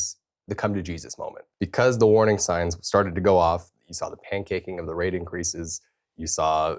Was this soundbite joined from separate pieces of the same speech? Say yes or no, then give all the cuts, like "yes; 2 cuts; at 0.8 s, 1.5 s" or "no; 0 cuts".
yes; 1 cut; at 1.4 s